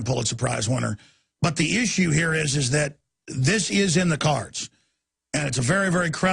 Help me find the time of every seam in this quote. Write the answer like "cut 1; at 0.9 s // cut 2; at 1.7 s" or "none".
cut 1; at 4.4 s